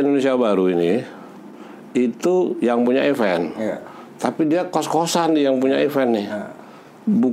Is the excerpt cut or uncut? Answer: uncut